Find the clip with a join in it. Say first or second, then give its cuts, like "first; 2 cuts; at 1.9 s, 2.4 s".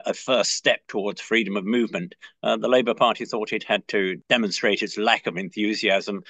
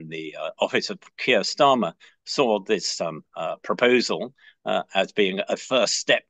first; 1 cut; at 4.2 s